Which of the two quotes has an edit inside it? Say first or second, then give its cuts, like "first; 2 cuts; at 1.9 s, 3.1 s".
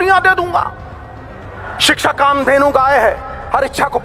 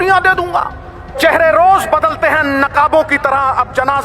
second; 1 cut; at 1.2 s